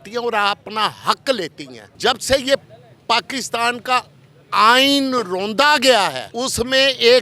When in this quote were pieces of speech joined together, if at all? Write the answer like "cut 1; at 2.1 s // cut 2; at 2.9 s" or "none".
cut 1; at 1.9 s // cut 2; at 6.2 s